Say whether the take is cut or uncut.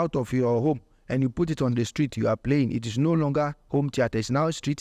uncut